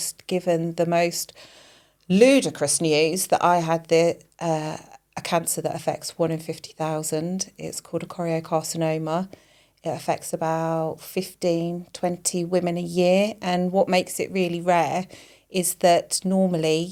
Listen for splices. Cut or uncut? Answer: uncut